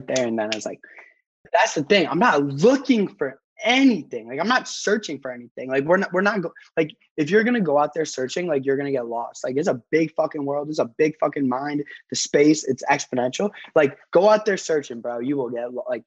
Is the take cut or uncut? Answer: cut